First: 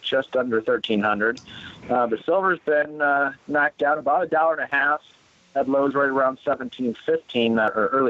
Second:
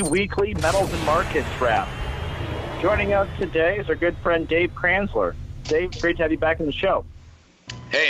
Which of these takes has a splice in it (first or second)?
first